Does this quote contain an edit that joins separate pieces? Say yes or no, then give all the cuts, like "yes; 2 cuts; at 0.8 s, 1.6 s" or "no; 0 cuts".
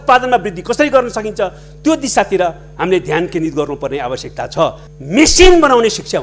yes; 1 cut; at 4.9 s